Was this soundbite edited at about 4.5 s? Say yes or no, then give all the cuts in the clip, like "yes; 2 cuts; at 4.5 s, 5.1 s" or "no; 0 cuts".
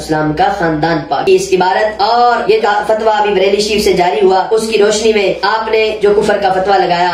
no; 1 cut; at 1.2 s